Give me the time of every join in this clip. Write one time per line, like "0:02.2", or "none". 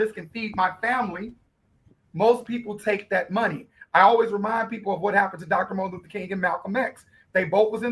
none

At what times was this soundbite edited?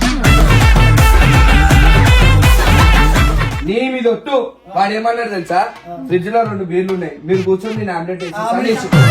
0:03.4

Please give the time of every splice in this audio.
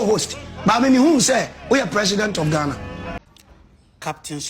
0:03.2

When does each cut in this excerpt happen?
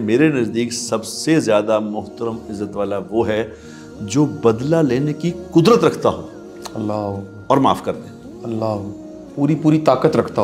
none

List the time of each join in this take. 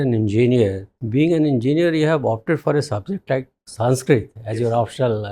0:00.9

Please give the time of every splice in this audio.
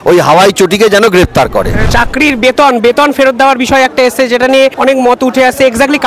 0:01.9
0:04.7

